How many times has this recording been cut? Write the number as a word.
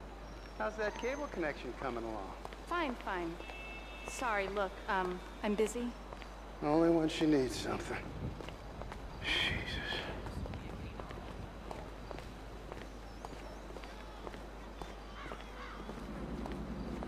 zero